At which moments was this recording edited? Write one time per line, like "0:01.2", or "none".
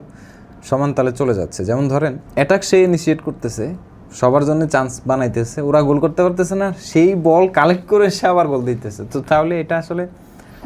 0:02.2